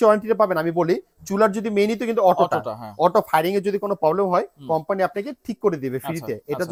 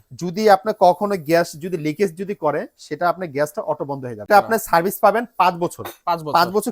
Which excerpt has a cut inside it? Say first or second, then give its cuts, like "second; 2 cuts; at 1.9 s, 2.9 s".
second; 1 cut; at 4.3 s